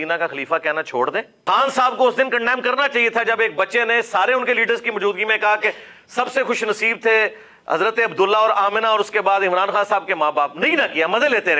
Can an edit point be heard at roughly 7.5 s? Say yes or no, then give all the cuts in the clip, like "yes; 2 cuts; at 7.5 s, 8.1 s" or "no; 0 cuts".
no; 1 cut; at 1.3 s